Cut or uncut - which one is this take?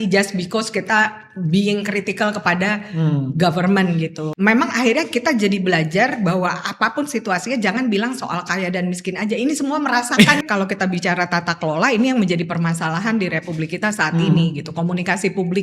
cut